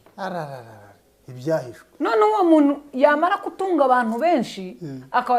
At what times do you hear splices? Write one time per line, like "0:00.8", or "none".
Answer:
0:01.8

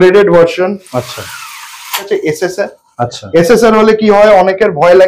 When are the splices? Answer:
0:02.0

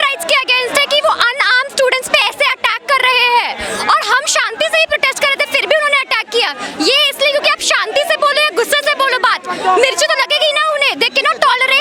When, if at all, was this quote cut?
none

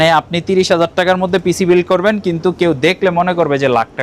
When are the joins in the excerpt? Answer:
none

